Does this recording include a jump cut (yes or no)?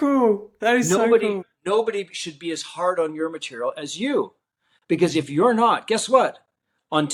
no